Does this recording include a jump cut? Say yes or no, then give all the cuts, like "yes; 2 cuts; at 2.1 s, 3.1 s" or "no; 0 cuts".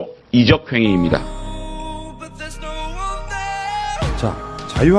yes; 1 cut; at 1.0 s